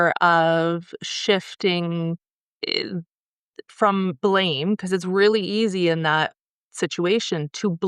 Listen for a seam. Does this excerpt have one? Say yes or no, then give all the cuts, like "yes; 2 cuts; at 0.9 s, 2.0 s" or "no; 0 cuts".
no; 0 cuts